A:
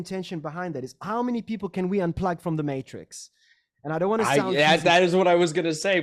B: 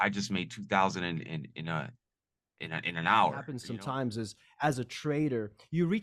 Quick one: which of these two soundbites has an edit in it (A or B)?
B